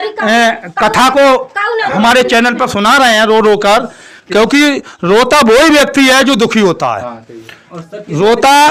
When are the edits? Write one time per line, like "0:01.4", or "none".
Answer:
none